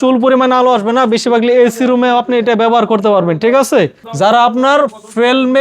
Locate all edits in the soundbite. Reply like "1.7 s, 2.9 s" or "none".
4.0 s